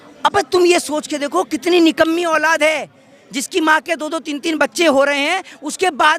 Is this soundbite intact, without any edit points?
yes; 0 cuts

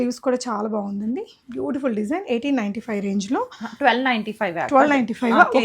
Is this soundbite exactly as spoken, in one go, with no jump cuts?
yes; 0 cuts

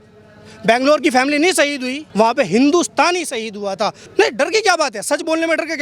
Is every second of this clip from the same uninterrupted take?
no; 2 cuts; at 2.0 s, 4.0 s

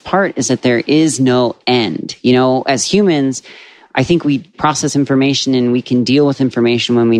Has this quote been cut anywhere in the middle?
no; 0 cuts

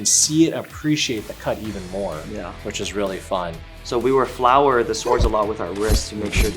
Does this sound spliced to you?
no; 0 cuts

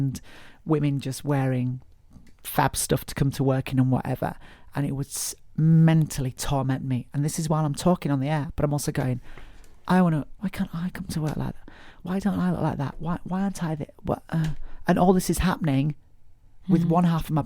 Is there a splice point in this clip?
yes; 3 cuts; at 8.5 s, 10.3 s, 12.0 s

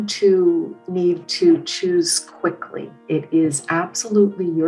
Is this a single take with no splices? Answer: yes; 0 cuts

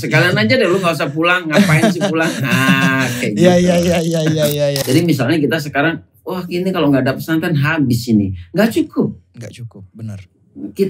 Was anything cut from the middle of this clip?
yes; 1 cut; at 4.8 s

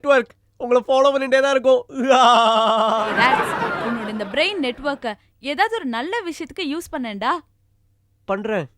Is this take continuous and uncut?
no; 1 cut; at 3.1 s

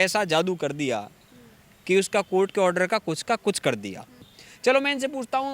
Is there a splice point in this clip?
yes; 1 cut; at 4.3 s

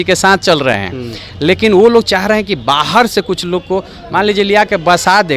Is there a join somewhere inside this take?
no; 0 cuts

